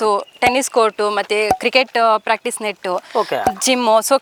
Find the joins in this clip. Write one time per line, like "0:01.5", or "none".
none

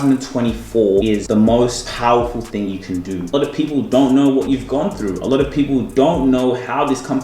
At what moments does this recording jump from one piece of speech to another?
0:01.1
0:01.9
0:03.3

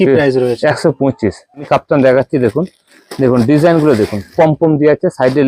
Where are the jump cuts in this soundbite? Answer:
0:01.7

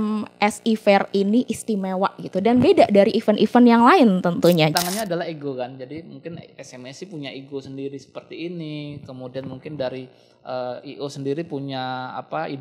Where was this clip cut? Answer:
0:04.7

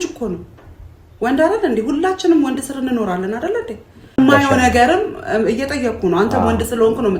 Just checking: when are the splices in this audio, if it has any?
0:04.2

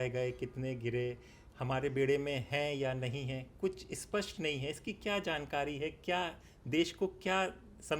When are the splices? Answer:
none

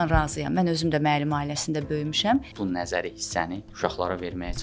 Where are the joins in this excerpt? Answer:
0:02.5
0:03.6

